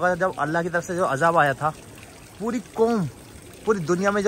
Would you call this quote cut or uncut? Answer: uncut